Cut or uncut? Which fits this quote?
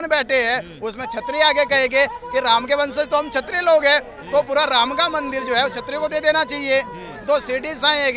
uncut